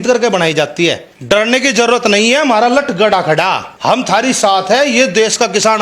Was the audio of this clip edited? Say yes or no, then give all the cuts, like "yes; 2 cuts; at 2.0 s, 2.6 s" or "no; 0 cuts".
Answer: yes; 2 cuts; at 1.1 s, 3.7 s